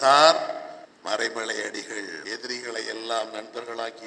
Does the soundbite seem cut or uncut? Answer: cut